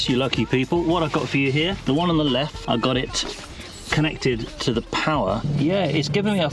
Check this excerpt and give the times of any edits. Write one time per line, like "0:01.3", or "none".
0:01.8
0:02.6
0:05.5

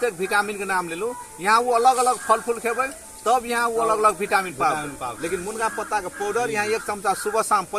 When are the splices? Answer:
none

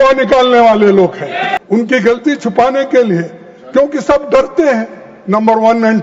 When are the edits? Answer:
0:01.6

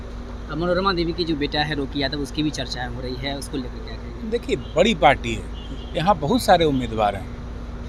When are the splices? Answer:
none

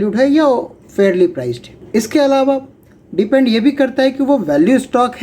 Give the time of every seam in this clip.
0:01.7

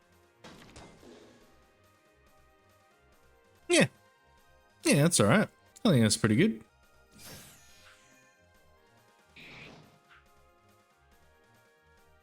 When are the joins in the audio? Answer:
0:03.6
0:05.6
0:06.7

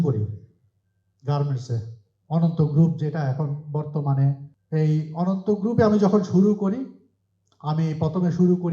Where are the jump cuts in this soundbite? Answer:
0:04.5

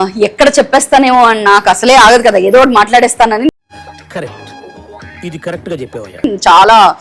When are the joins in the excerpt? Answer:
none

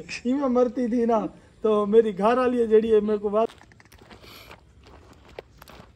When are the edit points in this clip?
0:03.5

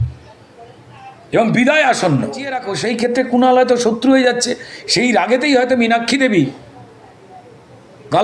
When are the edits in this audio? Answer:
0:02.8

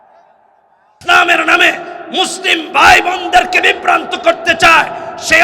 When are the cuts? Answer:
0:01.0

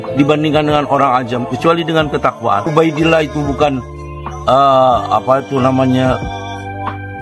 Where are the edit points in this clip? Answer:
0:02.7

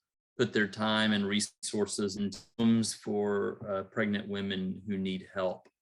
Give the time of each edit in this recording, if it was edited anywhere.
0:01.6
0:02.4

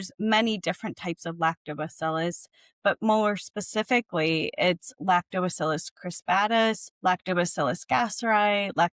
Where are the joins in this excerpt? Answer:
0:06.9

